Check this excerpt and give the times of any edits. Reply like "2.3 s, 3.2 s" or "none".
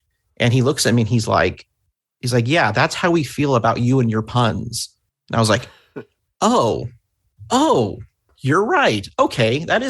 none